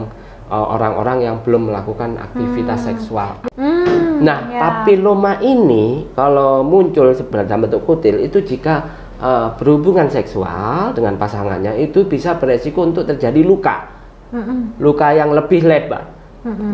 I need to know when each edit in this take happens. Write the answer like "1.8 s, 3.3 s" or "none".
3.3 s